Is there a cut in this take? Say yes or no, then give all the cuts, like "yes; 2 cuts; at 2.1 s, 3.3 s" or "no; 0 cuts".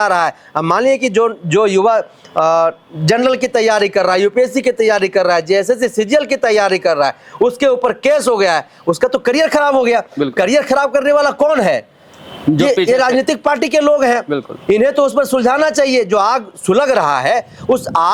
no; 0 cuts